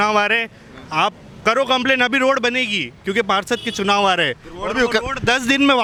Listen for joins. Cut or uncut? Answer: uncut